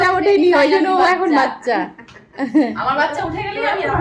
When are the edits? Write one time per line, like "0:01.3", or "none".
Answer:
none